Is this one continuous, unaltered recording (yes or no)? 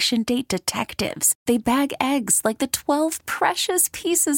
yes